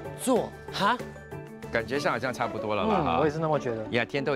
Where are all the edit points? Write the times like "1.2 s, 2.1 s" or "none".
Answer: 1.4 s